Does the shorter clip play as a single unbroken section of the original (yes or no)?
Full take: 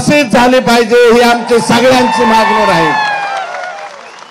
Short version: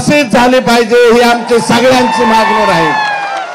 yes